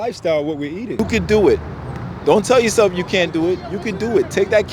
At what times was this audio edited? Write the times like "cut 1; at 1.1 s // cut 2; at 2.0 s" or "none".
cut 1; at 0.9 s

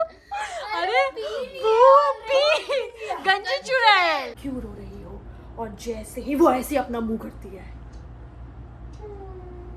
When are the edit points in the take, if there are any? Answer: cut 1; at 4.4 s

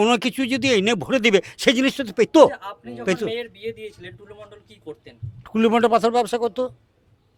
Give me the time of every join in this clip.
none

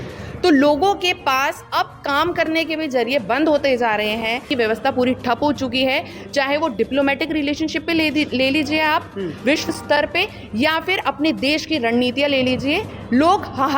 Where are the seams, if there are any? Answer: cut 1; at 4.5 s

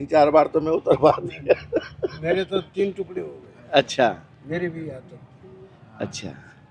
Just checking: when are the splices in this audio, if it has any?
none

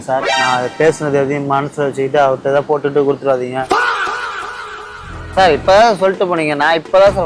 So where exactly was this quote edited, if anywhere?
cut 1; at 3.7 s // cut 2; at 5.3 s

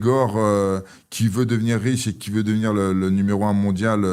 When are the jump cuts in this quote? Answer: none

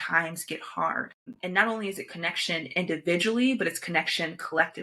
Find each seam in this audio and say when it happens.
cut 1; at 1.2 s

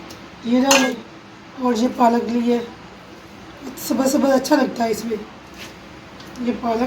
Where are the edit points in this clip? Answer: cut 1; at 0.9 s

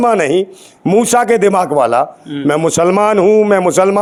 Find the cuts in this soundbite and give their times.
none

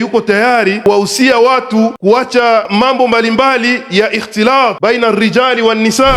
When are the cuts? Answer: cut 1; at 0.8 s // cut 2; at 2.0 s // cut 3; at 2.7 s // cut 4; at 4.8 s

